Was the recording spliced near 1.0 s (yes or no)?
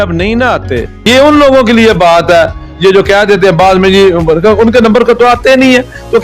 yes